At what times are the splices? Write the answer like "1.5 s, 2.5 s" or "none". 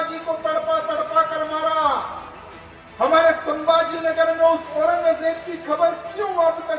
none